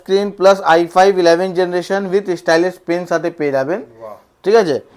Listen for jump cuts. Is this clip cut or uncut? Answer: uncut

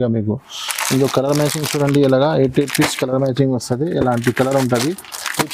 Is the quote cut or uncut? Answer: uncut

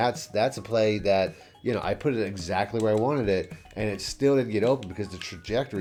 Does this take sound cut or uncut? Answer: uncut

